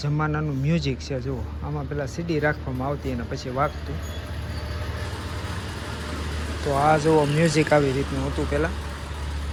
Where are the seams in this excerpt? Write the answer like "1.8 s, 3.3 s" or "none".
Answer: none